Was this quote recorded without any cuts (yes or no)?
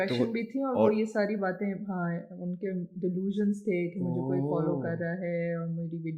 yes